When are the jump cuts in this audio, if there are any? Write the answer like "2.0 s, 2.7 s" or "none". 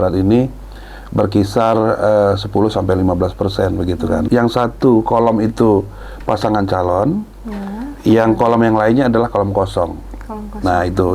4.3 s